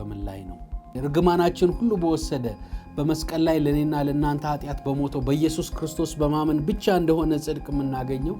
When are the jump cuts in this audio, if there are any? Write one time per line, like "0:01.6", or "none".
0:00.9